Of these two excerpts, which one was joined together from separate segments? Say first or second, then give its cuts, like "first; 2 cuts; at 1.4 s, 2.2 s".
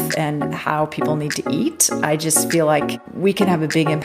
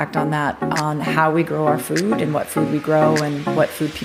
first; 1 cut; at 3.0 s